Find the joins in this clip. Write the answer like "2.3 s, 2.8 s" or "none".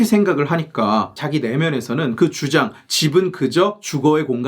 1.1 s